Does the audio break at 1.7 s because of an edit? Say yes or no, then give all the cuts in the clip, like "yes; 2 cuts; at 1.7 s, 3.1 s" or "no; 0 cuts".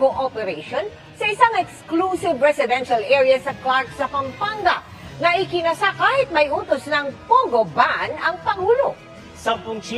no; 2 cuts; at 4.9 s, 6.5 s